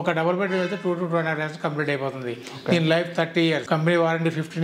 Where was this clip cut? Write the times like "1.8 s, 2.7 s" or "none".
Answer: 3.6 s